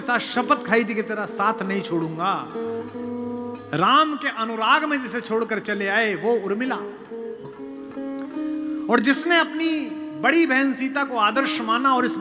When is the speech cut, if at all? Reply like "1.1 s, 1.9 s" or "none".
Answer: none